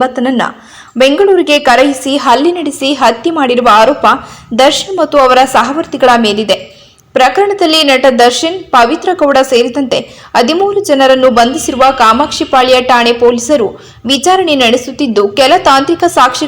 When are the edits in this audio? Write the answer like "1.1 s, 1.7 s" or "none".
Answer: 6.8 s